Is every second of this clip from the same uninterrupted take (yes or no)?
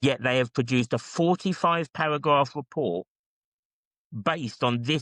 yes